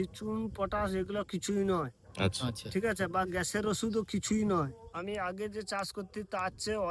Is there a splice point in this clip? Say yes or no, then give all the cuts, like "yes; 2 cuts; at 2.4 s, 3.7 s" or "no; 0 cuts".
yes; 1 cut; at 4.9 s